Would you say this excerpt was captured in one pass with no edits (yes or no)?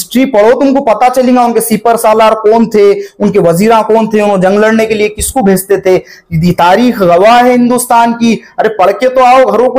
yes